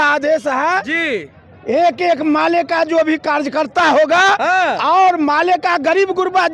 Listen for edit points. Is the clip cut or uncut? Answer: uncut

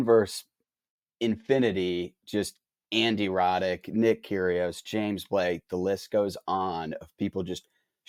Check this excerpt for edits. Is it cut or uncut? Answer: uncut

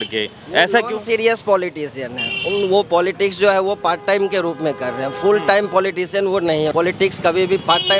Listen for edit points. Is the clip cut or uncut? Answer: cut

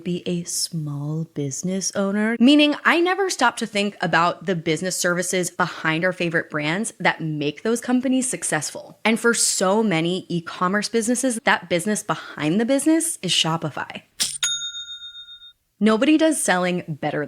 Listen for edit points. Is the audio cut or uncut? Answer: cut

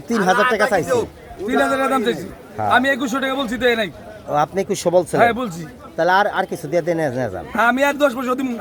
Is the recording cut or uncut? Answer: uncut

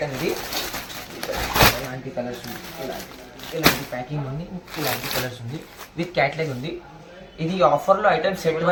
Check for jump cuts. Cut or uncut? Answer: uncut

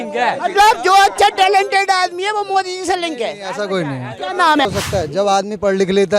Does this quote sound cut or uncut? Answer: cut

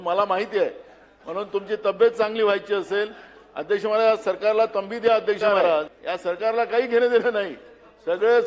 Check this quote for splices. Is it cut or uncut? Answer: cut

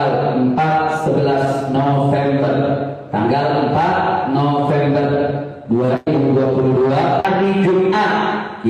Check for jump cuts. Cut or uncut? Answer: cut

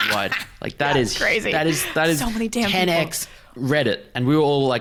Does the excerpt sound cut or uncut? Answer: uncut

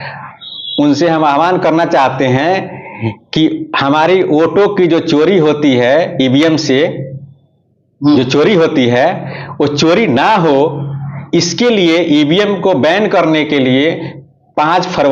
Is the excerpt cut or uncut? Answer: uncut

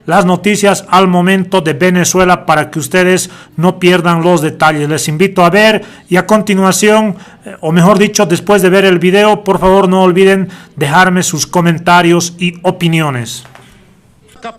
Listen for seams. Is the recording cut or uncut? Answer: cut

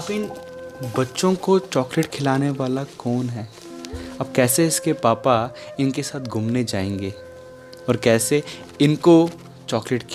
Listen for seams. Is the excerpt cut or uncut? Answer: uncut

